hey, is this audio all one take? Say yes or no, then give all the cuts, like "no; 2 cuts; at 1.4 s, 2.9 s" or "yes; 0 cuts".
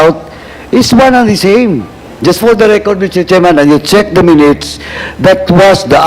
no; 1 cut; at 2.1 s